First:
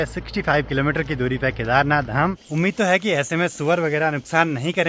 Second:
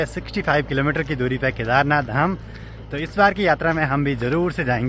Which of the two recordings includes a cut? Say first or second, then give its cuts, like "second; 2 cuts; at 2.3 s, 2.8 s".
first; 1 cut; at 2.4 s